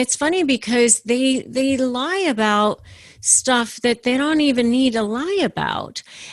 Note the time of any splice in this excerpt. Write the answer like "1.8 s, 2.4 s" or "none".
none